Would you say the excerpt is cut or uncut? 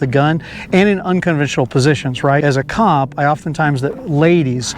cut